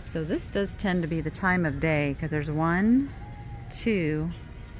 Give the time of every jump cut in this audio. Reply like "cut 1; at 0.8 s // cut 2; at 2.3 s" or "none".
none